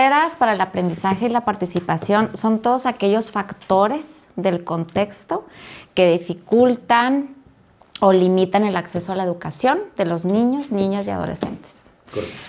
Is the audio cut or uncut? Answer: uncut